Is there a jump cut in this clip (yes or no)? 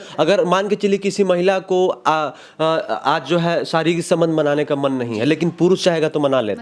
no